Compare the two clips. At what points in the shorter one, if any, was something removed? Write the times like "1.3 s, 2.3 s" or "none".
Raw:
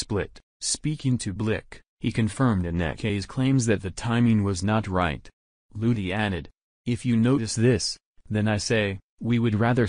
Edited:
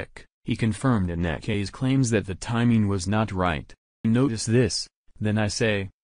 4.0 s